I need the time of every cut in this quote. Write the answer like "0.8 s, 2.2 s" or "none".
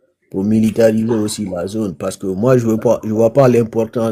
none